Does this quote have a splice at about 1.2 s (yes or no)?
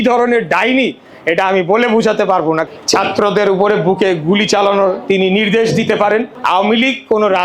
no